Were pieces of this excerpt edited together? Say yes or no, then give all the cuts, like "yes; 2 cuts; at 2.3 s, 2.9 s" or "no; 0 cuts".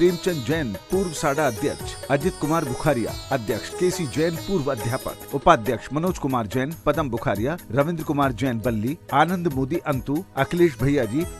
no; 0 cuts